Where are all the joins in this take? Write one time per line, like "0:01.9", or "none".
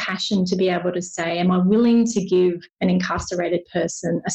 0:02.7